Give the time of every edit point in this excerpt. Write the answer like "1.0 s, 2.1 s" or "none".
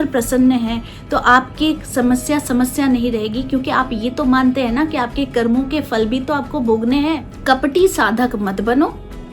7.3 s